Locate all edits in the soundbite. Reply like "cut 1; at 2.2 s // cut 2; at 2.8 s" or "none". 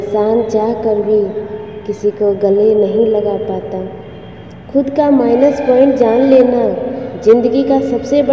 none